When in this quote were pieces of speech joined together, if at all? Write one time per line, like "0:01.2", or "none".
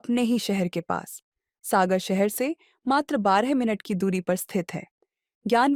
none

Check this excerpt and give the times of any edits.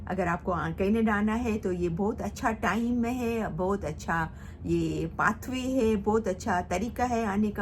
none

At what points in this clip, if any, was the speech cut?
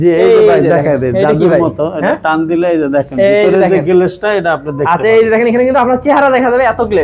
none

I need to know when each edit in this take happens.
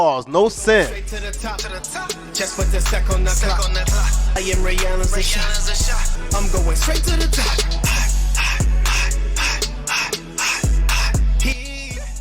0:00.9

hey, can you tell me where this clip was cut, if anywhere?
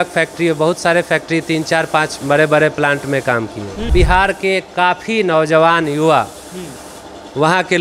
0:03.9

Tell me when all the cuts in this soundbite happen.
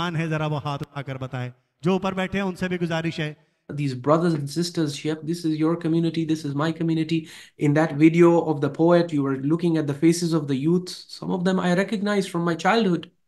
0:03.6

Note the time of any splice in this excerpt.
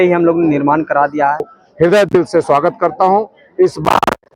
0:01.6

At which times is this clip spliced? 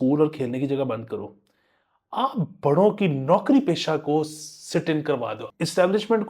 0:05.4

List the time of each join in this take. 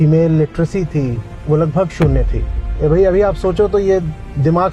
0:01.3

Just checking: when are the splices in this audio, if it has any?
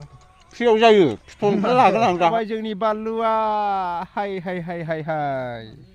0:02.3

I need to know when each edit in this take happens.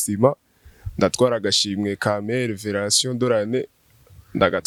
none

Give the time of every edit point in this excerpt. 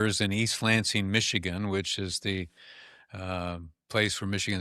none

